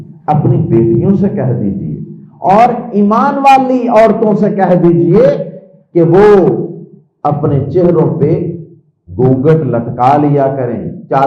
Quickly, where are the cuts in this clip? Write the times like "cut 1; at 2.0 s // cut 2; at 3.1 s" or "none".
none